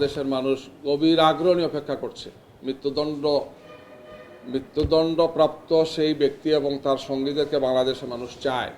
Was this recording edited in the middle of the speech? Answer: no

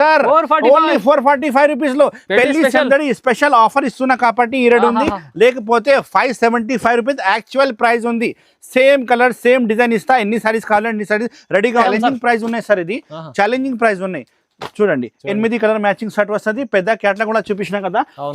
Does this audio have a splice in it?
yes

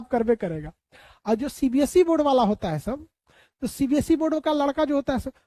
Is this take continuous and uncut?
yes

